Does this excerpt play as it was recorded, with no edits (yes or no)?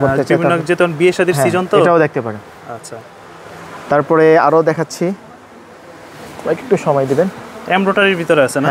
yes